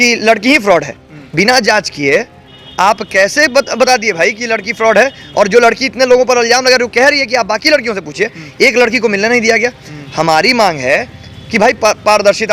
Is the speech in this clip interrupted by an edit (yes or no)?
no